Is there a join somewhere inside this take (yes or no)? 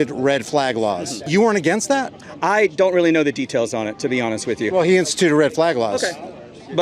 yes